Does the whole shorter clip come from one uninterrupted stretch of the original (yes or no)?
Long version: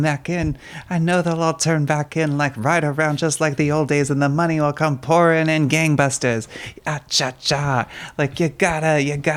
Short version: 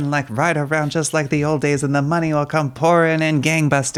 yes